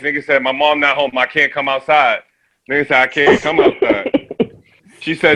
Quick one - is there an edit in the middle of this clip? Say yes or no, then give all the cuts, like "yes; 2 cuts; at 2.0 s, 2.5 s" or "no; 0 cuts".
no; 0 cuts